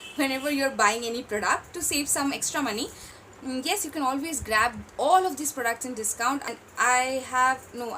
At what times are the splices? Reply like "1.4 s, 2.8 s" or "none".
3.1 s, 6.5 s